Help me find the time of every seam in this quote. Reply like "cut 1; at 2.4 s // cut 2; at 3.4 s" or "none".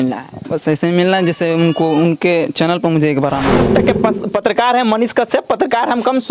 cut 1; at 3.6 s

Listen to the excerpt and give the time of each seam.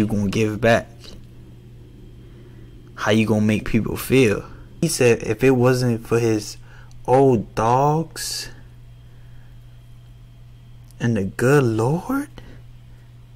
cut 1; at 4.8 s

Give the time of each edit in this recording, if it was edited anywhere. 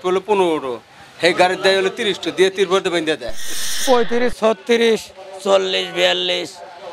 cut 1; at 3.8 s

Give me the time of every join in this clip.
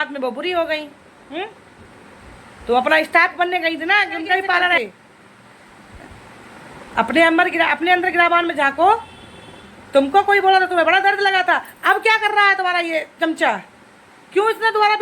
cut 1; at 4.8 s

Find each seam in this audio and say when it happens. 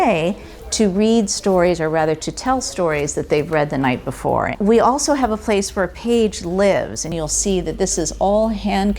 cut 1; at 4.5 s // cut 2; at 7.1 s

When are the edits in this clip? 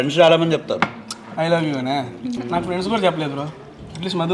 cut 1; at 2.4 s

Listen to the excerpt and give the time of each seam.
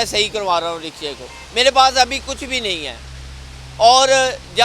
none

